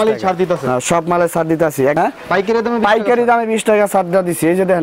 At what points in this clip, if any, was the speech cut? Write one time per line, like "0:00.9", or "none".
0:02.0